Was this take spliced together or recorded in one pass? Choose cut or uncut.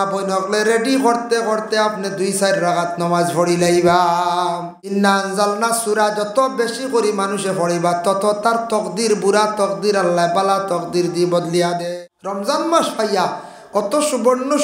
cut